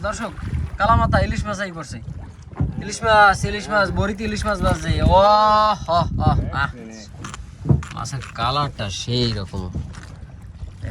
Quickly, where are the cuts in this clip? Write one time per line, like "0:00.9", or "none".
0:07.0